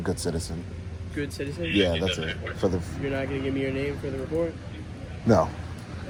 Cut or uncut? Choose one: uncut